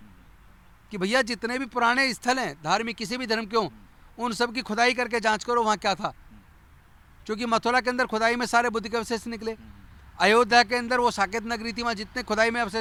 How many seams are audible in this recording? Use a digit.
0